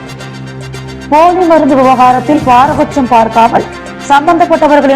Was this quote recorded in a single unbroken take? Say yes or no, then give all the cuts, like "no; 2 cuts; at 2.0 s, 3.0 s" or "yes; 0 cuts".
no; 1 cut; at 1.1 s